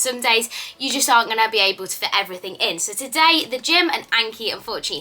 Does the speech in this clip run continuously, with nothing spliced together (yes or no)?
yes